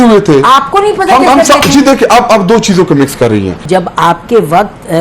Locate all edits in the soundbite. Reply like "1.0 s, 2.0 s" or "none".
3.6 s